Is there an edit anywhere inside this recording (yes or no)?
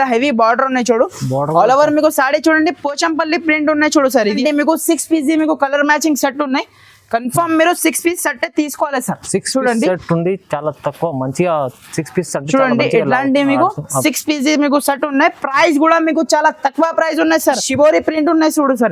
yes